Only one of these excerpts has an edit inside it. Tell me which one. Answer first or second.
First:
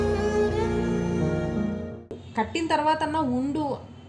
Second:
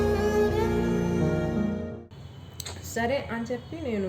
first